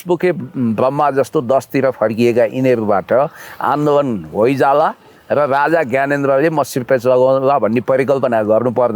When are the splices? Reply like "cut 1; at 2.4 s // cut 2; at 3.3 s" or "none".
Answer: none